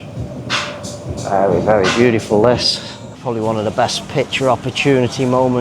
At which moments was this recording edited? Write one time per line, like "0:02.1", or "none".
0:03.2

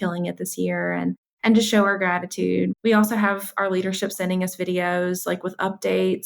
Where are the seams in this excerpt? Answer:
0:02.7

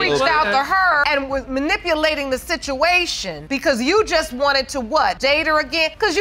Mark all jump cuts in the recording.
0:03.4
0:05.4

